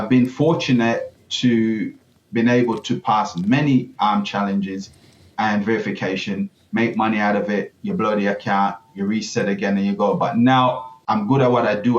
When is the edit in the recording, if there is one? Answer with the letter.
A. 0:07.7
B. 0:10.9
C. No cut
B